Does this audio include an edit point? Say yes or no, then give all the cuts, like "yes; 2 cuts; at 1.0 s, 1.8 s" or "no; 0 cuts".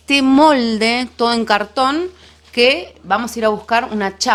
no; 0 cuts